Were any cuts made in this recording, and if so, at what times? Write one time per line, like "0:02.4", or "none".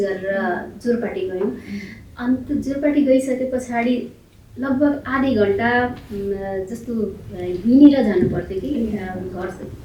none